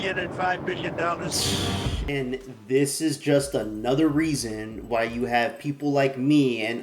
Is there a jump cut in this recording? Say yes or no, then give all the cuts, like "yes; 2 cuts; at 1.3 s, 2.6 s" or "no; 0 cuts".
yes; 1 cut; at 1.9 s